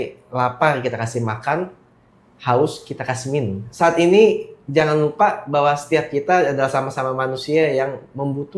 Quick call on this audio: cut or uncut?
uncut